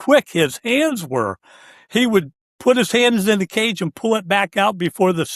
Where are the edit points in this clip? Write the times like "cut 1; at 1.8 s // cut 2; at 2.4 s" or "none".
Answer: none